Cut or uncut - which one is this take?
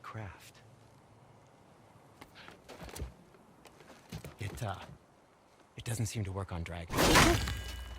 cut